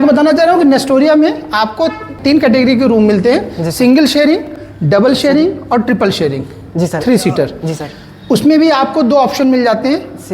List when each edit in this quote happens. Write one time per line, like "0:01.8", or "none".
0:02.2

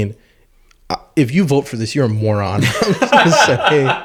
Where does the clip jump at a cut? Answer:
none

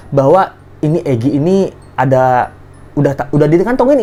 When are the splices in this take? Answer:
none

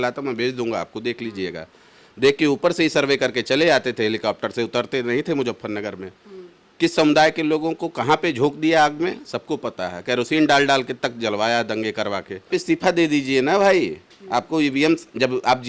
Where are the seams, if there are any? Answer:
0:12.5

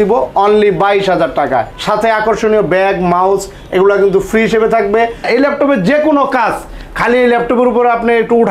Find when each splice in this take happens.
0:01.8
0:05.2

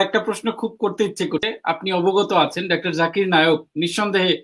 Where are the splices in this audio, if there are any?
0:01.4

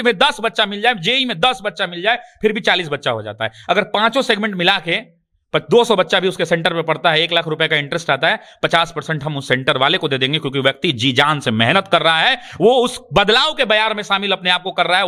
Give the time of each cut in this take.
none

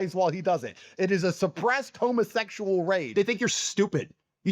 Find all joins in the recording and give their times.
0:03.1

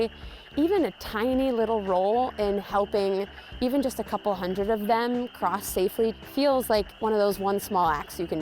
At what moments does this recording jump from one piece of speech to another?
0:06.2
0:06.9

